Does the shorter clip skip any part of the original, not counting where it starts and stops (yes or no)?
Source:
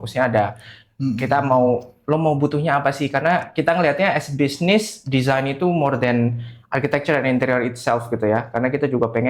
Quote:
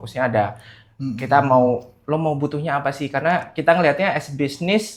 no